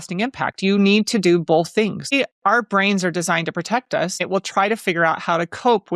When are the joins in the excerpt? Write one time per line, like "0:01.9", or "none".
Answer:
0:02.1
0:04.2